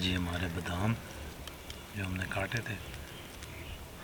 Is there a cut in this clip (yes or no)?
no